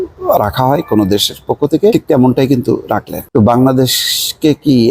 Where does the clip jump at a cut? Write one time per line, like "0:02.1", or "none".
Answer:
0:01.9
0:03.2